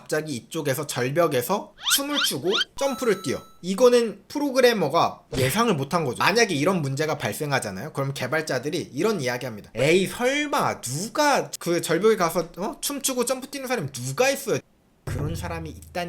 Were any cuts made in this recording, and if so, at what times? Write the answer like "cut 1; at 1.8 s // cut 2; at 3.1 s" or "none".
cut 1; at 6.1 s // cut 2; at 14.7 s

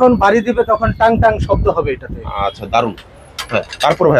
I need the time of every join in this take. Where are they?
none

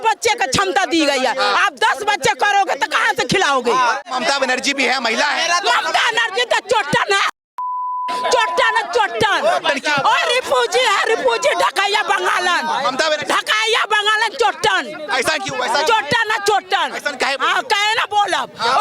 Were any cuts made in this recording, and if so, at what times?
cut 1; at 4.0 s

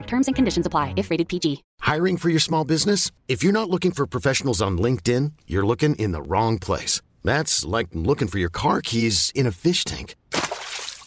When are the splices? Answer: cut 1; at 1.7 s

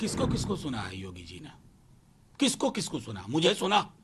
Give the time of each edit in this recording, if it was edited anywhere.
none

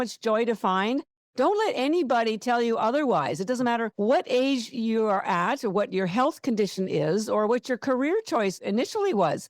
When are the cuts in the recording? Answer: cut 1; at 8.6 s

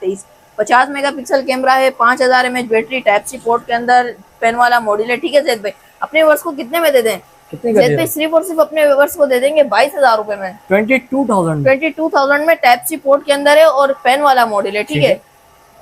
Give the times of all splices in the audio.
none

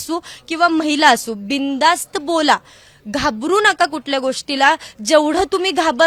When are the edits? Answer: none

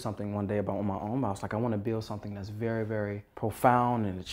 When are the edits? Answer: cut 1; at 3.3 s

